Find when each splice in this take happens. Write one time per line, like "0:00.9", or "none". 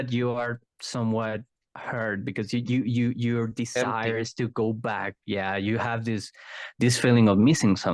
none